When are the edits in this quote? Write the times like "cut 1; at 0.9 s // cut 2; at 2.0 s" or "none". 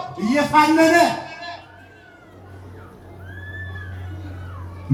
none